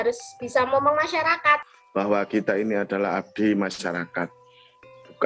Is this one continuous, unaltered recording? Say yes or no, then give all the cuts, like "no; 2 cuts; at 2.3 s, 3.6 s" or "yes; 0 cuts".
no; 1 cut; at 1.8 s